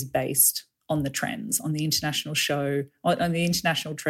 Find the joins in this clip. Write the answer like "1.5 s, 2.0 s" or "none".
none